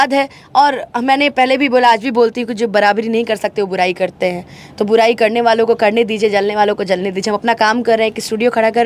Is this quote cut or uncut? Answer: uncut